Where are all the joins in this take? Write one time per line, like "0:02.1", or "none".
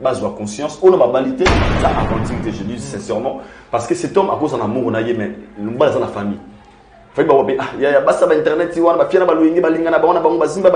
0:01.7